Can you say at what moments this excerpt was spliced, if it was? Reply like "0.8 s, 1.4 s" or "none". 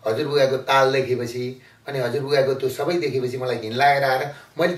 none